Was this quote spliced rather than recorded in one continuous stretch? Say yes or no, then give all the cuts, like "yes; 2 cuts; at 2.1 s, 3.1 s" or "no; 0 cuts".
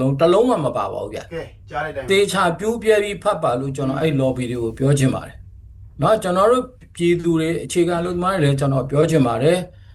no; 0 cuts